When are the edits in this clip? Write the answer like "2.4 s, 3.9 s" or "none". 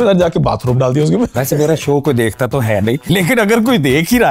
1.3 s, 3.0 s